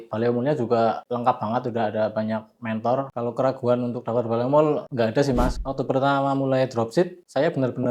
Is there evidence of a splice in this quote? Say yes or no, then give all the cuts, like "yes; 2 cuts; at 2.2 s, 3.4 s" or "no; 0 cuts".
yes; 2 cuts; at 3.1 s, 5.5 s